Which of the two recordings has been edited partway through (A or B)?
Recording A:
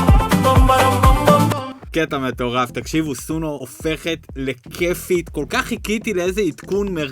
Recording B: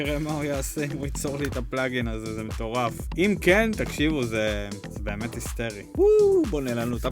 A